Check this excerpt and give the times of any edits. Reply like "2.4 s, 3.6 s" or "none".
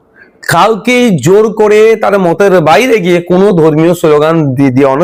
none